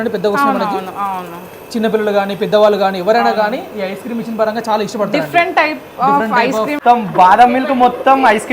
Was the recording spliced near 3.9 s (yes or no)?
no